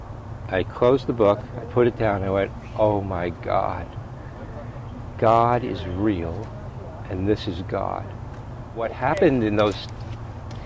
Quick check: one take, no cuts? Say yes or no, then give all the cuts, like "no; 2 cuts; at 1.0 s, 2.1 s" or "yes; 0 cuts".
no; 1 cut; at 9.0 s